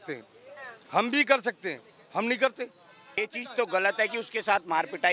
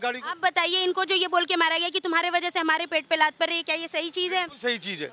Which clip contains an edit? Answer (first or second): first